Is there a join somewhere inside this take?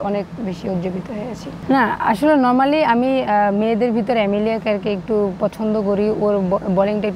yes; 1 cut; at 1.5 s

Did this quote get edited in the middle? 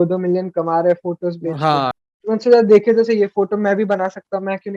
yes; 1 cut; at 1.9 s

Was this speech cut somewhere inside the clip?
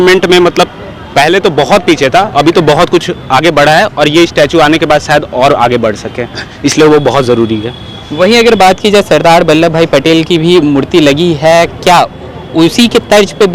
no; 0 cuts

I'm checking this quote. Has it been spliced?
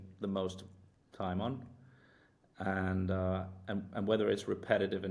no; 0 cuts

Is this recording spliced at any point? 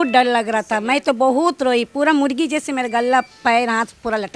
no; 0 cuts

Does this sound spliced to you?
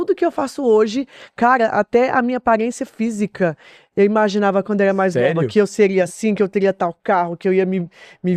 no; 0 cuts

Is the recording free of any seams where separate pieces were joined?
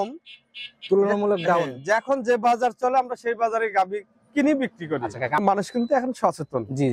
no; 1 cut; at 5.4 s

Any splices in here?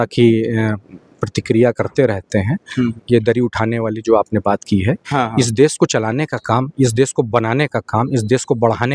no; 0 cuts

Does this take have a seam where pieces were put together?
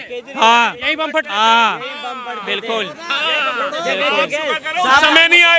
no; 0 cuts

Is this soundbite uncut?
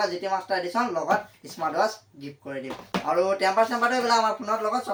yes; 0 cuts

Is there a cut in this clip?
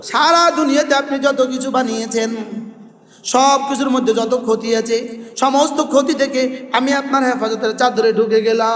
no; 0 cuts

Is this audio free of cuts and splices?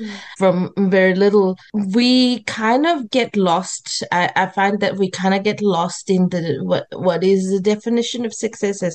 yes; 0 cuts

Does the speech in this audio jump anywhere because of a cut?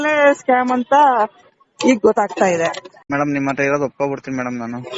yes; 1 cut; at 2.9 s

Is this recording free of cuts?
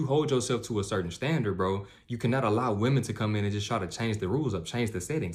yes; 0 cuts

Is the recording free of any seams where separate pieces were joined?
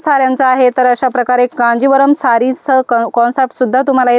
yes; 0 cuts

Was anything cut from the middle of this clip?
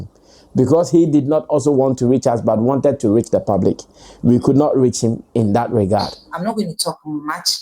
yes; 1 cut; at 6.3 s

